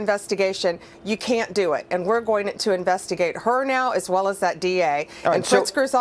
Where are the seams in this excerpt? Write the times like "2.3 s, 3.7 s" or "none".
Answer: none